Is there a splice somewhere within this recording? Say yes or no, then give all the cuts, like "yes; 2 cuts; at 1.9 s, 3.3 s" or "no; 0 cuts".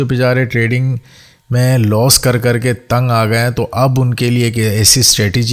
no; 0 cuts